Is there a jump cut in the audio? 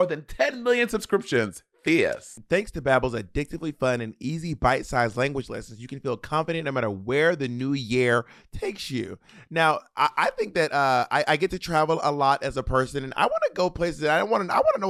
no; 0 cuts

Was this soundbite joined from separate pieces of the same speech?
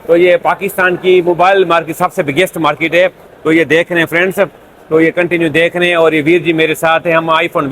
no; 0 cuts

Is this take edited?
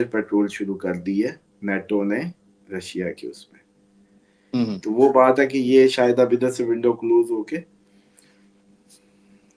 no; 0 cuts

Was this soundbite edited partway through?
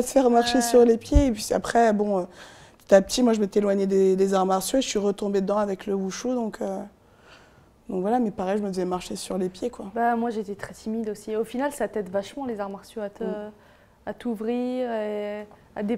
no; 0 cuts

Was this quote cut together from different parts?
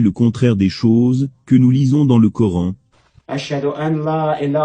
yes; 1 cut; at 2.8 s

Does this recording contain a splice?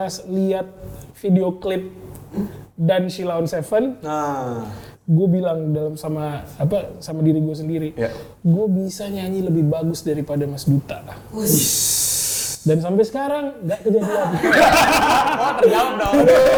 no; 0 cuts

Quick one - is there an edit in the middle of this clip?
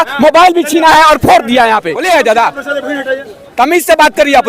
yes; 1 cut; at 1.9 s

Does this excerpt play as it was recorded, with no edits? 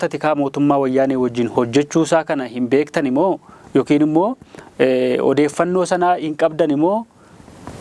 yes; 0 cuts

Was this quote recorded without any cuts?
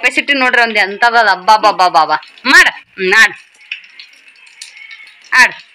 yes; 0 cuts

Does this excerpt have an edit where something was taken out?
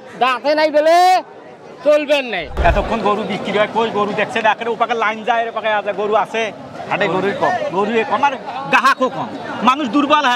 yes; 1 cut; at 2.5 s

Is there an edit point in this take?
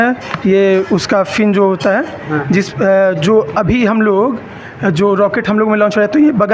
no; 0 cuts

